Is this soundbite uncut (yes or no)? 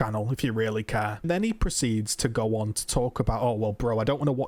yes